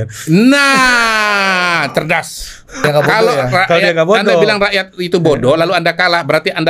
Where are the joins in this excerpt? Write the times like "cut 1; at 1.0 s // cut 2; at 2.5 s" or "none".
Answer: cut 1; at 2.8 s